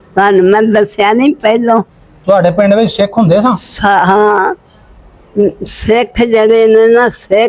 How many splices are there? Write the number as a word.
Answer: one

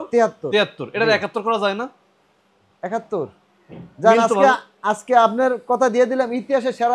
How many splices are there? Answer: zero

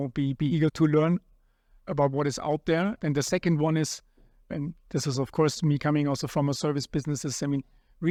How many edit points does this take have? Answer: zero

